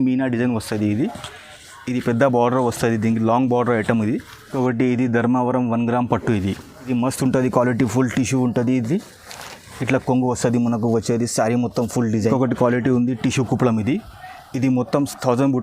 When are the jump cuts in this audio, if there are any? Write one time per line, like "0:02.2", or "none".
0:04.5
0:06.9
0:12.2